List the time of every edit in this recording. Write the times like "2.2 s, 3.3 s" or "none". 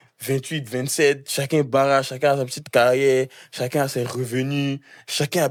none